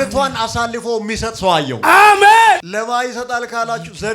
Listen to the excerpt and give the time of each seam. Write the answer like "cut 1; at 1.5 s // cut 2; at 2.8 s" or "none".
cut 1; at 2.7 s